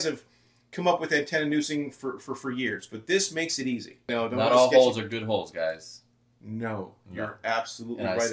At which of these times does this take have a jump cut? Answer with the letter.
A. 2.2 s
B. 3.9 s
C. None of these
B